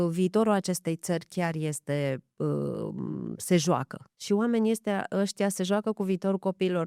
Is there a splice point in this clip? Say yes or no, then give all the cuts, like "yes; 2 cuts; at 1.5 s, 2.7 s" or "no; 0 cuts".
no; 0 cuts